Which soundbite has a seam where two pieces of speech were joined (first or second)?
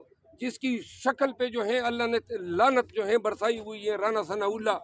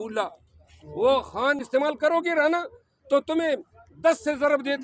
second